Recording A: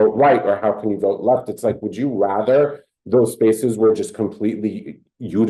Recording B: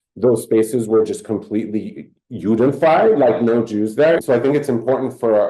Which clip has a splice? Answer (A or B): B